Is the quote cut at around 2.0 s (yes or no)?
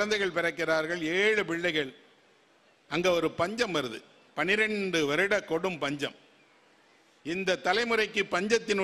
no